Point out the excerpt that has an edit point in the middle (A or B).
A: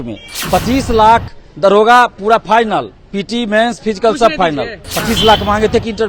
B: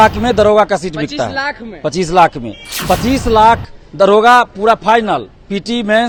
A